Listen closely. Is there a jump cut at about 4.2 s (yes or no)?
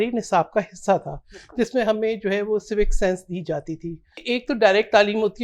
yes